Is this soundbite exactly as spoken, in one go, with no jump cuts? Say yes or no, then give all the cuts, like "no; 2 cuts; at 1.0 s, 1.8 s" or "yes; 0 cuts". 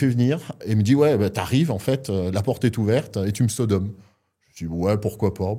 yes; 0 cuts